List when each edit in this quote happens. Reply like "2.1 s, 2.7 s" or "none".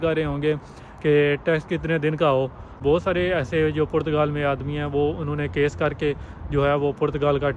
2.8 s

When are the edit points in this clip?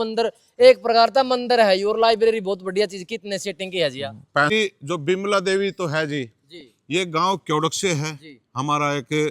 4.5 s

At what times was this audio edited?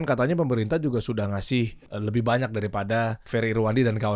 1.8 s, 3.2 s

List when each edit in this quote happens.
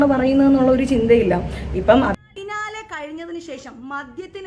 2.2 s

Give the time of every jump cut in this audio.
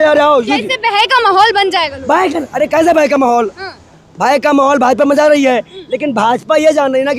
none

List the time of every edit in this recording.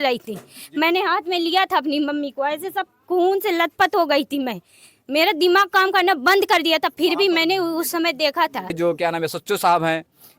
8.7 s

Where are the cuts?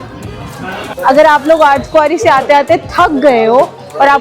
1.0 s

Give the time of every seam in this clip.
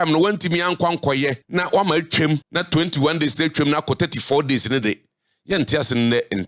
1.4 s, 2.5 s

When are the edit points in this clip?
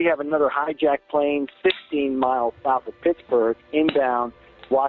none

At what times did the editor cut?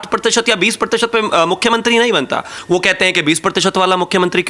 2.5 s

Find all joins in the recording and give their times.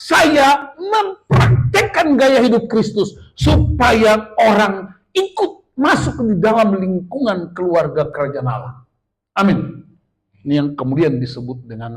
none

